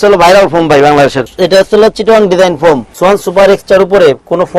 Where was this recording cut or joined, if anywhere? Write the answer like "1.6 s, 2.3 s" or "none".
1.2 s, 2.9 s

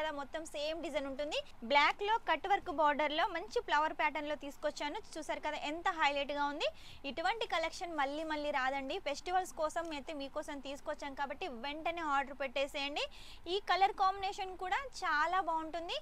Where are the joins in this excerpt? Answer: 1.5 s

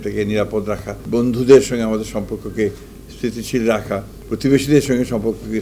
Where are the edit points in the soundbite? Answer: 1.0 s, 4.1 s

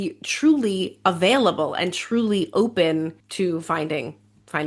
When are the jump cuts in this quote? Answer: 3.2 s

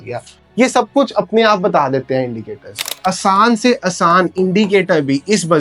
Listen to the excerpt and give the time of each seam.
2.9 s

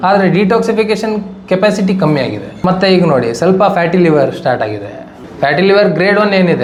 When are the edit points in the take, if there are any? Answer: none

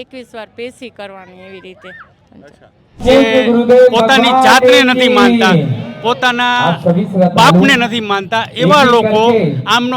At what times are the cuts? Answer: 3.0 s

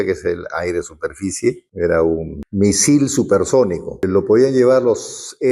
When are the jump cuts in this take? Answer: 1.7 s, 2.4 s, 4.1 s

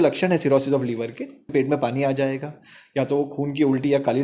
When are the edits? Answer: 1.5 s

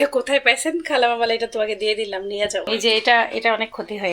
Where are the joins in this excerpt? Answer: 2.7 s

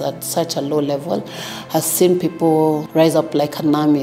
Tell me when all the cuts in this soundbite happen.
2.8 s

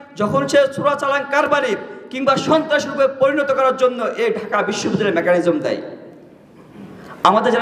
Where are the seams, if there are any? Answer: none

